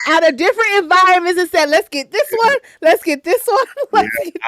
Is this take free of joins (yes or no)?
yes